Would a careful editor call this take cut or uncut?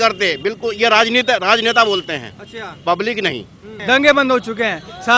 cut